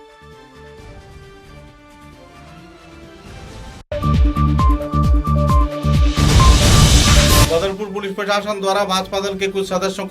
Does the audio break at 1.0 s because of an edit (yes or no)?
no